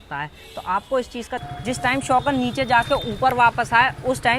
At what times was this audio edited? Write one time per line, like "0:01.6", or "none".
0:01.5